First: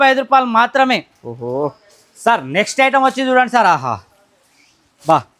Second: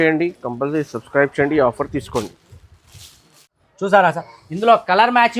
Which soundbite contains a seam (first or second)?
second